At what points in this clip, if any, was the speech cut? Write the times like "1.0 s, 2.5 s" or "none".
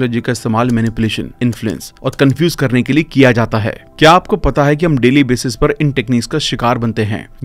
none